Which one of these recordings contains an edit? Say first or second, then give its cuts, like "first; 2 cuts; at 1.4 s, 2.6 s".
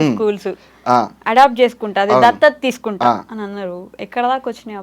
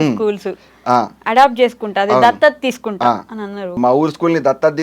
second; 1 cut; at 3.8 s